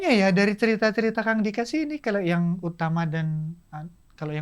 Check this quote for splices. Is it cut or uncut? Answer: uncut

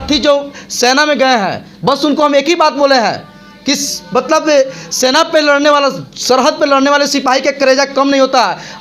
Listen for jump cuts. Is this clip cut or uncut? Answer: uncut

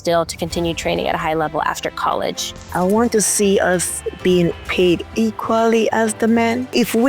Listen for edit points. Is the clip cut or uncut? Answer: cut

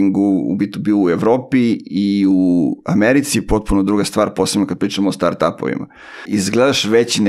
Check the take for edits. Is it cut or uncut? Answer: cut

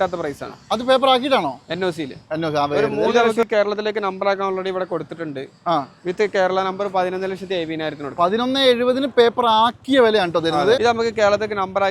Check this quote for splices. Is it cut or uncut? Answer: cut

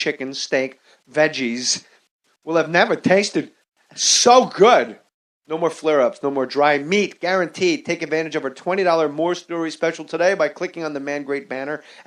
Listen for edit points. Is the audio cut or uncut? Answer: uncut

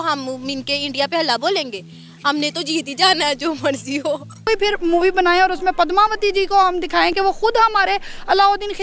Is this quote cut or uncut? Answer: cut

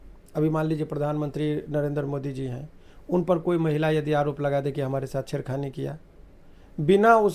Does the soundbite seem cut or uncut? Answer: uncut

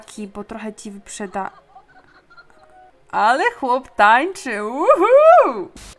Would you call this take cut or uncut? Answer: uncut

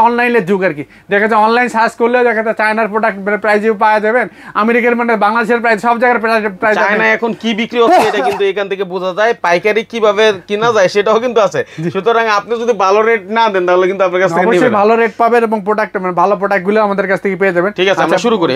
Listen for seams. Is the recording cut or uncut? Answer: uncut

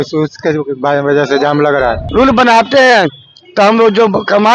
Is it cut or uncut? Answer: cut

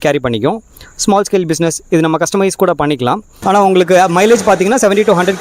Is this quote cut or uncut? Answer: cut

